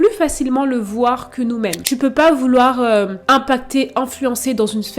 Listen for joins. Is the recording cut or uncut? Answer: cut